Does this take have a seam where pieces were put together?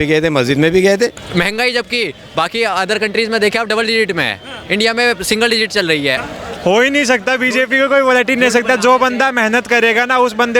yes; 2 cuts; at 1.2 s, 6.2 s

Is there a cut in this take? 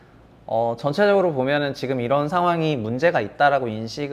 no; 0 cuts

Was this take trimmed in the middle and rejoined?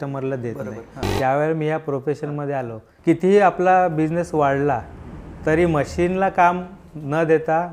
yes; 2 cuts; at 1.0 s, 2.8 s

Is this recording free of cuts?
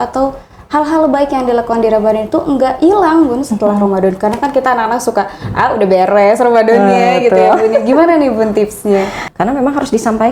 no; 1 cut; at 9.2 s

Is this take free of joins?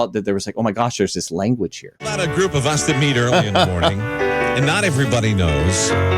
no; 1 cut; at 1.9 s

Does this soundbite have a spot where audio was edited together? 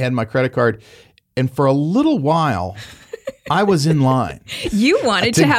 no; 0 cuts

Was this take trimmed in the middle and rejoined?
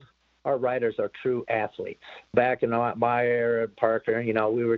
yes; 1 cut; at 2.3 s

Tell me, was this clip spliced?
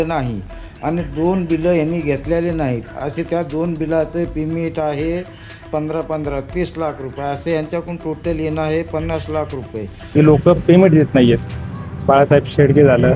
yes; 1 cut; at 10.1 s

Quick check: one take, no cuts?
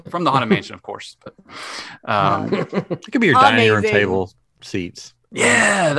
yes; 0 cuts

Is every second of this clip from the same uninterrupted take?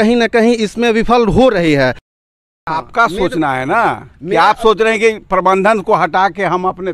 no; 1 cut; at 2.3 s

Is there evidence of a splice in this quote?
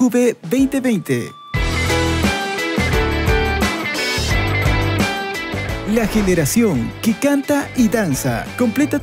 no; 0 cuts

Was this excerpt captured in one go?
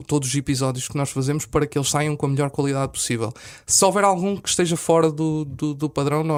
yes; 0 cuts

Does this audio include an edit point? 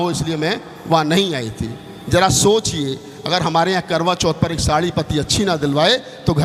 no; 0 cuts

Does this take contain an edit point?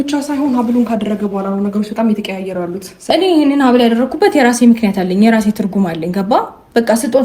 yes; 1 cut; at 3.0 s

